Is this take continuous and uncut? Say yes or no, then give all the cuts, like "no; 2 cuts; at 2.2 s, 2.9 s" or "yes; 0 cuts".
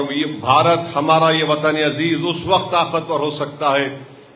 yes; 0 cuts